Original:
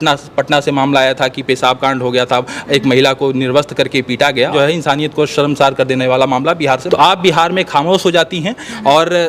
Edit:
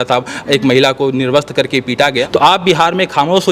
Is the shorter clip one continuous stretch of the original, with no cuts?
no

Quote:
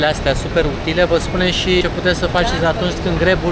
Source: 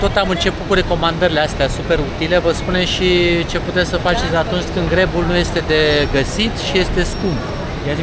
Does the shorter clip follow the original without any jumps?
no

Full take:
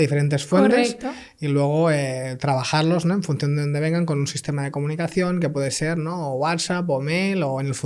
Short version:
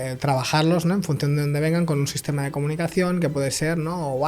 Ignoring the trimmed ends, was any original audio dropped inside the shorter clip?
no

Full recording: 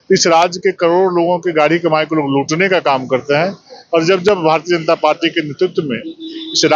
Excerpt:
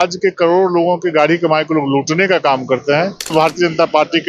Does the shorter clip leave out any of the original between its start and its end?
yes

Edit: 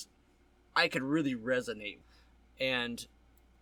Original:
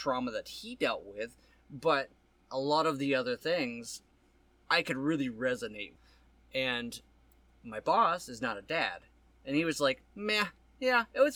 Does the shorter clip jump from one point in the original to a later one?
no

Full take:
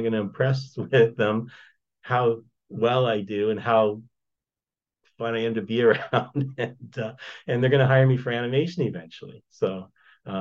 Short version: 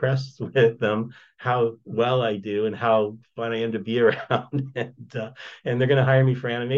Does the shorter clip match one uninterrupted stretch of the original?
no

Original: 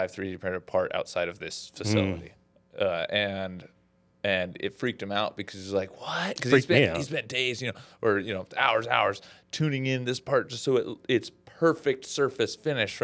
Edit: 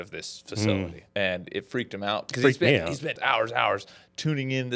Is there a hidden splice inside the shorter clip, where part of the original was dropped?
yes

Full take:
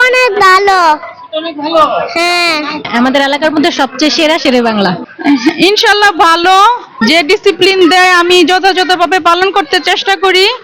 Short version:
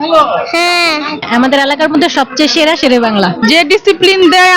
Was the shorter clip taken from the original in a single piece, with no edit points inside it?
no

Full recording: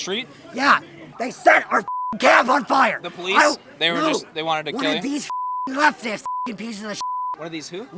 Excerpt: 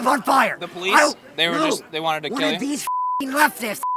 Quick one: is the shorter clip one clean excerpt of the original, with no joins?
yes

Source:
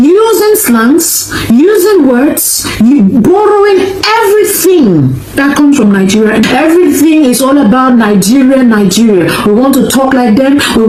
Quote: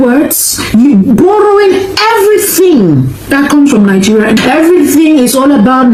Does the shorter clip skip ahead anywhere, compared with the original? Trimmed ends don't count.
no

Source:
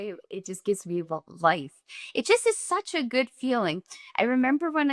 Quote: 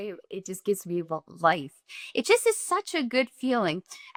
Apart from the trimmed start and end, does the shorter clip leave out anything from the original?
no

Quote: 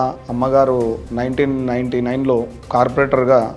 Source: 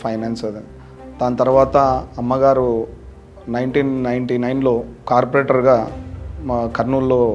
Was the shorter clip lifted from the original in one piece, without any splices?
no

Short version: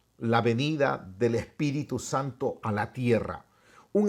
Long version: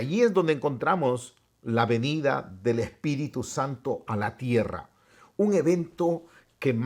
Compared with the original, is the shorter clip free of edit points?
yes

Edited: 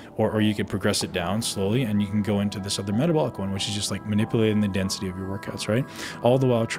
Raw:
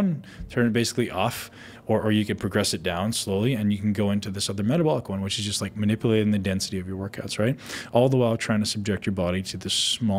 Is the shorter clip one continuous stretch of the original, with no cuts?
yes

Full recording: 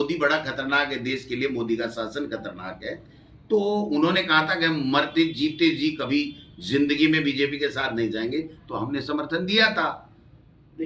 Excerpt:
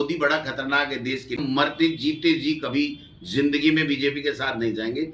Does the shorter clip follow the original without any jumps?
no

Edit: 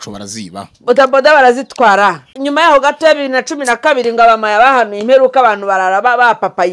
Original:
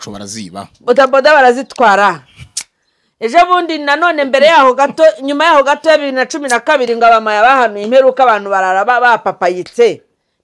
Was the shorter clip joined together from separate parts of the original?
yes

